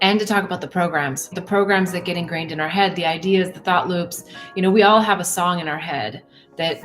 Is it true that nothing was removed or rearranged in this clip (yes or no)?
no